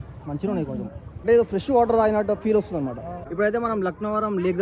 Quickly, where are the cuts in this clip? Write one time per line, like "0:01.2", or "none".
0:01.0
0:03.1